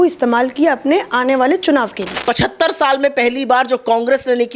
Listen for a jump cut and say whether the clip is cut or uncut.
cut